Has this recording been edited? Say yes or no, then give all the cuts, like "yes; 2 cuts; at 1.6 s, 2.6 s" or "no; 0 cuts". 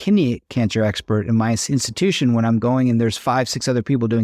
no; 0 cuts